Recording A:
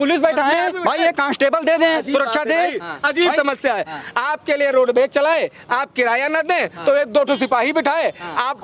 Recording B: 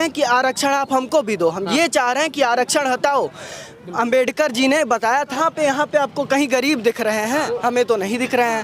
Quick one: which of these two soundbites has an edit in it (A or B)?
B